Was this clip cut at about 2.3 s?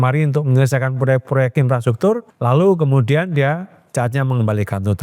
yes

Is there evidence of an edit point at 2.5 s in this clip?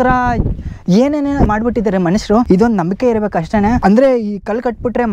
yes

